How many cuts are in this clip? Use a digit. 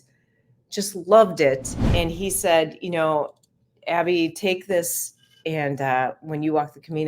1